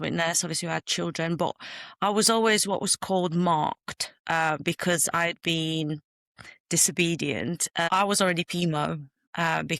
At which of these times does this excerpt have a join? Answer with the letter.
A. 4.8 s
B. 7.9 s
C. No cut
B